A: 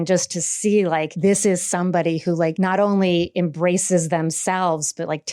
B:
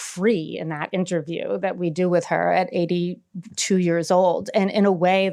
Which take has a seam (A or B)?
A